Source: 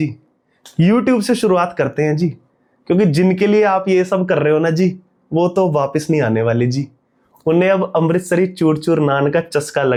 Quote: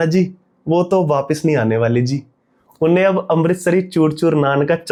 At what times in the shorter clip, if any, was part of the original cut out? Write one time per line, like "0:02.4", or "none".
none